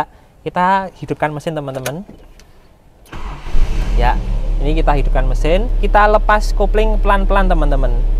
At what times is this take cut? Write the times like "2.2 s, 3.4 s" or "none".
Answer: 5.7 s